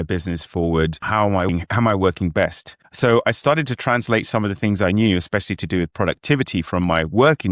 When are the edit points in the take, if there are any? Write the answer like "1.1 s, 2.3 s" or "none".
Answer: 1.1 s